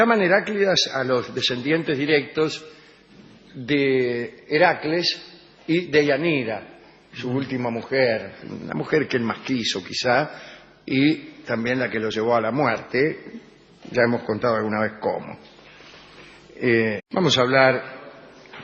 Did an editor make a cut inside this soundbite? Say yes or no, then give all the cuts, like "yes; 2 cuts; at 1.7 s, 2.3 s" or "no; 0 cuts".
no; 0 cuts